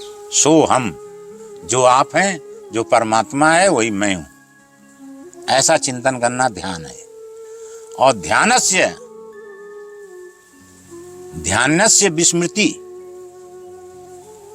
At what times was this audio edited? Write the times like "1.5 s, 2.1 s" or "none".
12.7 s